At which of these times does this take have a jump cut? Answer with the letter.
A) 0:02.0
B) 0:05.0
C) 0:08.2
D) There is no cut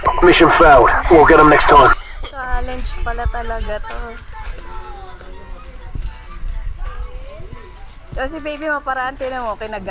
A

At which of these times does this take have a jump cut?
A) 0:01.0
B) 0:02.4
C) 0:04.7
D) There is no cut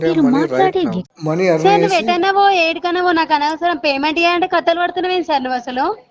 A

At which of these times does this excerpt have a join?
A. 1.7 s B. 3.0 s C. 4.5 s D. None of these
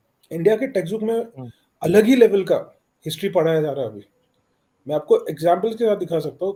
D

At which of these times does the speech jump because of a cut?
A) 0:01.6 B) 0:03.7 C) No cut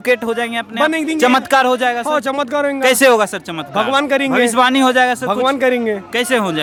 C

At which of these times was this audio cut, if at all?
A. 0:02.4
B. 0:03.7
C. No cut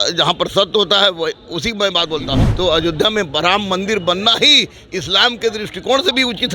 A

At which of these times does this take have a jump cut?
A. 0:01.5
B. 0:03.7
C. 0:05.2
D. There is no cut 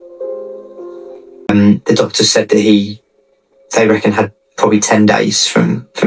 A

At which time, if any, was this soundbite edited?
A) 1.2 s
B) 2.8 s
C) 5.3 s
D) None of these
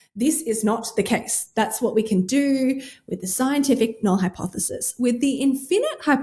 D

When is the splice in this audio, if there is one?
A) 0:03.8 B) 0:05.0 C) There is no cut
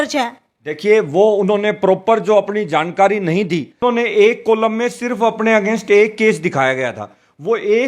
A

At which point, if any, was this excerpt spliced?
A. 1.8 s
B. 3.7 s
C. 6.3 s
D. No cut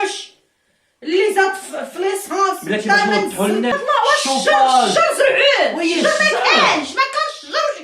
B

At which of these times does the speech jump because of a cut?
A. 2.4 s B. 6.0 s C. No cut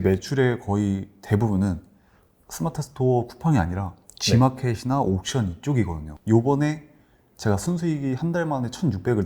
B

